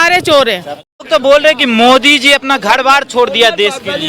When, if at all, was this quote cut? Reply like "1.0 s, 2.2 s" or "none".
1.1 s